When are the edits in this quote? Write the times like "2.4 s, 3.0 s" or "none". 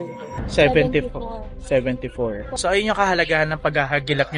2.5 s

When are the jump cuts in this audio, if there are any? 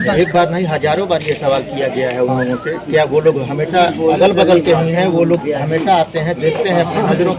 none

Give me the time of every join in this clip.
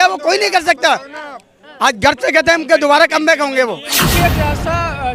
4.0 s

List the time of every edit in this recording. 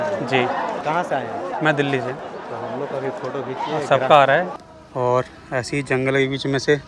0.8 s, 2.2 s, 4.6 s

